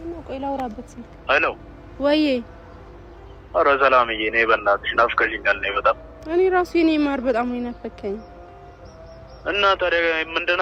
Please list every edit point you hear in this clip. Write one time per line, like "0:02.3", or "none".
none